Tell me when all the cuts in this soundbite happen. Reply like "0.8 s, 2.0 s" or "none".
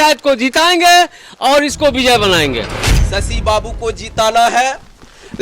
2.9 s